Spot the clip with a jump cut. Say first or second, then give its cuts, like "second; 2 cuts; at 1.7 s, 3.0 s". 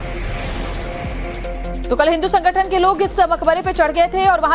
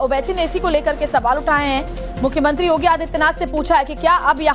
second; 1 cut; at 2.6 s